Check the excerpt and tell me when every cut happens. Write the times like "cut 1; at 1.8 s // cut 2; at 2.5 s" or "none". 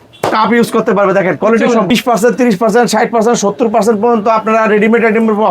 cut 1; at 1.9 s